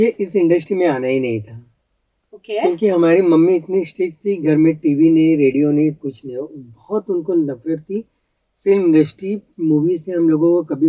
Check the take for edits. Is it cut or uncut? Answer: uncut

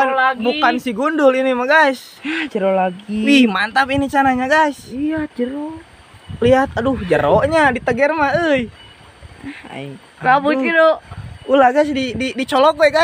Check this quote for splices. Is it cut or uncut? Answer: uncut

